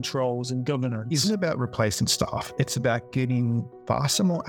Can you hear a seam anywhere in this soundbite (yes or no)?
yes